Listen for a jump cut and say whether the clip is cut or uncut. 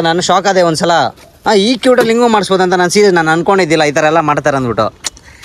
uncut